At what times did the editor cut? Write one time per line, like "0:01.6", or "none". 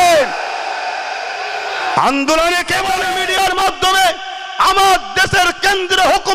0:03.1